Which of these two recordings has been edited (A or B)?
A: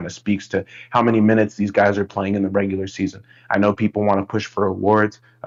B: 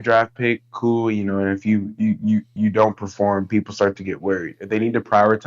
B